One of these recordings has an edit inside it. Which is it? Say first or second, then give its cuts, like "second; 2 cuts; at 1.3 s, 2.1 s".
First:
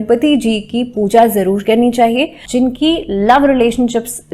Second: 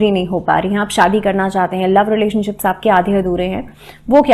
first; 1 cut; at 2.7 s